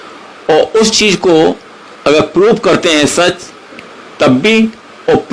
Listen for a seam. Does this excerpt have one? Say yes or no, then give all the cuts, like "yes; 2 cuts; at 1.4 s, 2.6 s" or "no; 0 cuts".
no; 0 cuts